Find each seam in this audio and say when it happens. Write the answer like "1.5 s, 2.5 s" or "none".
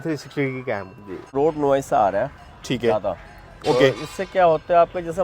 1.3 s